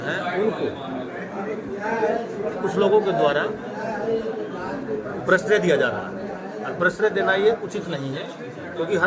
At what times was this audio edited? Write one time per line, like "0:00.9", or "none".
none